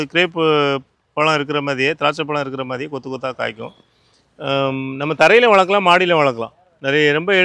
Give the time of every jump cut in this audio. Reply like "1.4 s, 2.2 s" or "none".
none